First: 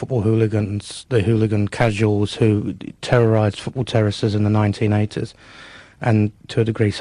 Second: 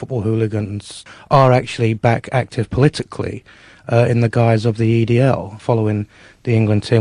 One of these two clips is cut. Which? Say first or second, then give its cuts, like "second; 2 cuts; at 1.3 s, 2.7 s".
second; 2 cuts; at 1.0 s, 5.6 s